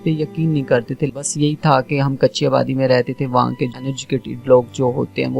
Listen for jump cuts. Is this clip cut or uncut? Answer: cut